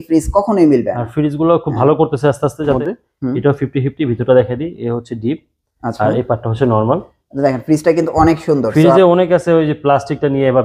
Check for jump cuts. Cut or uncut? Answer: cut